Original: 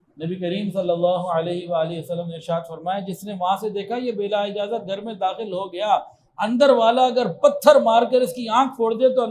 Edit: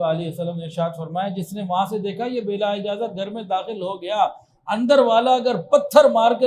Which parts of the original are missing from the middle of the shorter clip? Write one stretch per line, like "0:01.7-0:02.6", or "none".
none